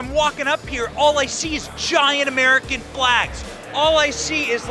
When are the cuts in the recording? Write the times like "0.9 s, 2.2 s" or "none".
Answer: none